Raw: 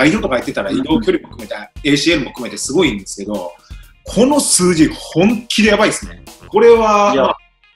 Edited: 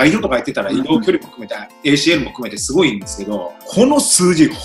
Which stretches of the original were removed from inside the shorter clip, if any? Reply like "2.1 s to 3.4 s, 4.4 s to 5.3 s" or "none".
3.6 s to 4.0 s